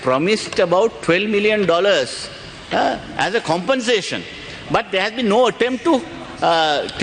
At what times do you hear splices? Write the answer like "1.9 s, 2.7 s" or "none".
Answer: none